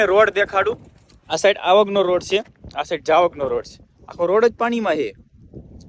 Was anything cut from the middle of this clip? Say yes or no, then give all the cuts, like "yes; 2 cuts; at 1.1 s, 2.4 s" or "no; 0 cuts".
no; 0 cuts